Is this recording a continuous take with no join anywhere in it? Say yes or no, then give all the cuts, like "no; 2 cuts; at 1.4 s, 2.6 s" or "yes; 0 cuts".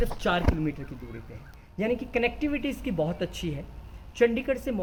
yes; 0 cuts